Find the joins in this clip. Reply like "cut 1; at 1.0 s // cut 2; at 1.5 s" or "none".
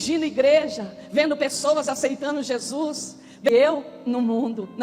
cut 1; at 3.5 s

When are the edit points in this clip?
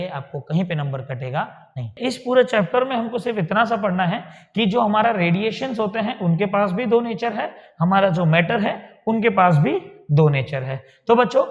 cut 1; at 1.9 s

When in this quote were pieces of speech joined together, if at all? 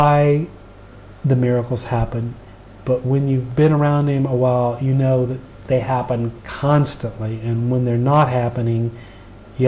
none

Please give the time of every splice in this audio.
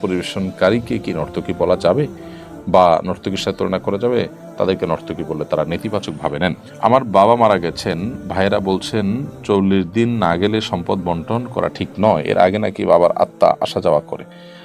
cut 1; at 6.7 s

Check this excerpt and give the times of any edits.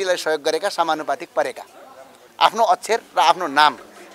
none

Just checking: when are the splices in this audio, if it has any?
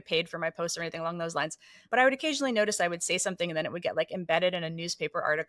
cut 1; at 1.8 s

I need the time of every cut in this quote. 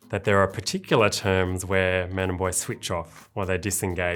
none

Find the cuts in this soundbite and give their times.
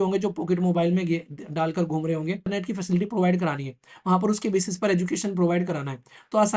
cut 1; at 2.5 s

